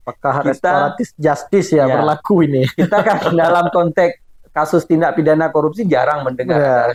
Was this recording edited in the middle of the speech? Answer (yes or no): no